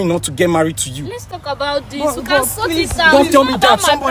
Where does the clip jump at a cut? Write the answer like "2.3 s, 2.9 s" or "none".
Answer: none